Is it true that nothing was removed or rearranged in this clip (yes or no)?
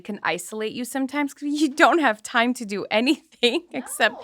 yes